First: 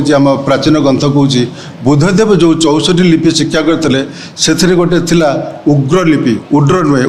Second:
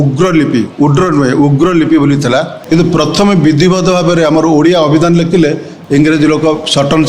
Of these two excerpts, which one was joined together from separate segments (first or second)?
second